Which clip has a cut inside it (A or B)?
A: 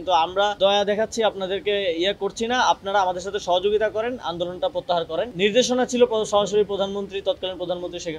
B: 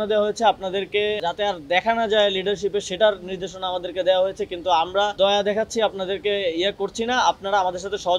B